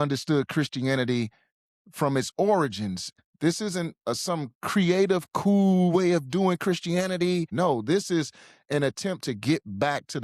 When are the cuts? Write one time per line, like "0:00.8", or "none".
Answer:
0:03.1
0:07.5